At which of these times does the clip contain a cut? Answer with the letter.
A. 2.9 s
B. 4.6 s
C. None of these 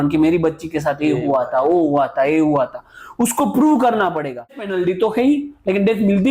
B